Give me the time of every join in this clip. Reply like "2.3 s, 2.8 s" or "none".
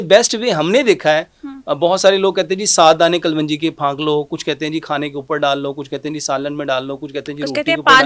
none